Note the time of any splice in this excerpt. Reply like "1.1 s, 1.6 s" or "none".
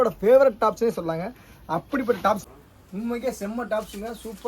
2.4 s